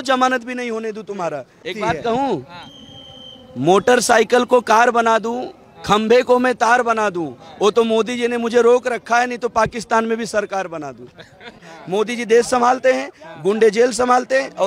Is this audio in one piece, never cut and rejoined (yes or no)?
no